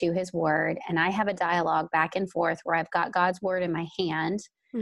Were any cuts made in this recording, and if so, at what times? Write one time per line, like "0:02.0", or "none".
none